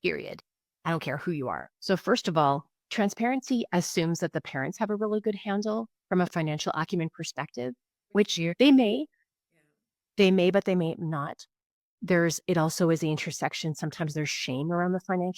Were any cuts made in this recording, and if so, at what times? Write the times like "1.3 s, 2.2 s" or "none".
1.7 s